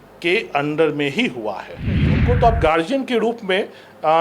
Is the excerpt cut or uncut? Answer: cut